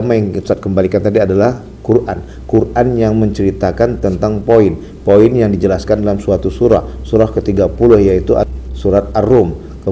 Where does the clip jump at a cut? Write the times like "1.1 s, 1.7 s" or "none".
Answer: 8.3 s